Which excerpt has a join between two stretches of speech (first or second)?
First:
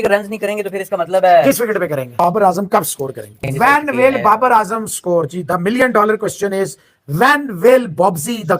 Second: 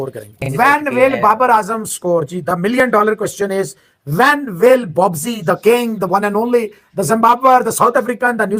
first